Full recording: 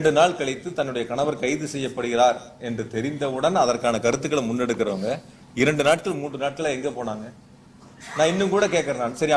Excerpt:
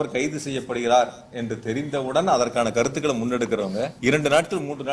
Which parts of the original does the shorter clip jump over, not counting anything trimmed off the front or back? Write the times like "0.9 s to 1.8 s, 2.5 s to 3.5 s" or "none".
5.2 s to 5.5 s